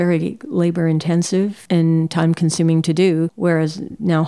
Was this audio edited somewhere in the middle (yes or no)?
yes